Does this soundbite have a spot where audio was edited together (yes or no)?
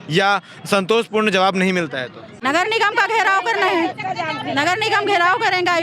no